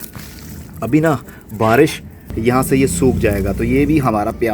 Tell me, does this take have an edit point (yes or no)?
yes